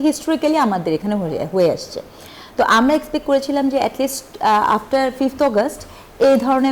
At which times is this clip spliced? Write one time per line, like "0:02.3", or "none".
none